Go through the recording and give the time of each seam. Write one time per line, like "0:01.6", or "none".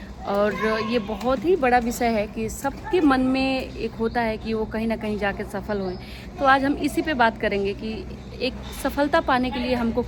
none